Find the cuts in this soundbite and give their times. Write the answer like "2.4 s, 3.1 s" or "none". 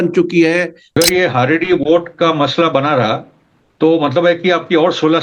1.0 s